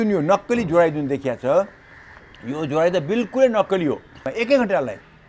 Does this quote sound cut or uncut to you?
cut